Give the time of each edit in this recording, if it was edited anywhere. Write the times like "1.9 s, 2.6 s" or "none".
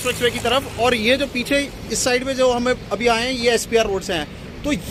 none